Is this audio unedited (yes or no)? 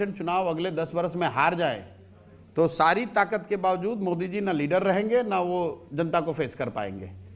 yes